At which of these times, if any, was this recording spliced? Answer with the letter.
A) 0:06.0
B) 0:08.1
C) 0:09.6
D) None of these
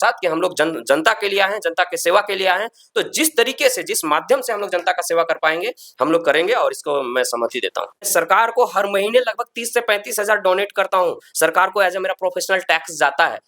B